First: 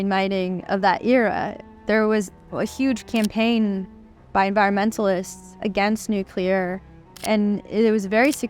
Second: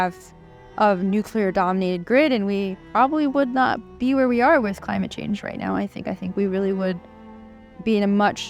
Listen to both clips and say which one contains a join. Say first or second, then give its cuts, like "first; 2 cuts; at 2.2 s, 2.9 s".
first; 3 cuts; at 1.6 s, 2.6 s, 7.2 s